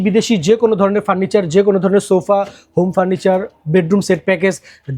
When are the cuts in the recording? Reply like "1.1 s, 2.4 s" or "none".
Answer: none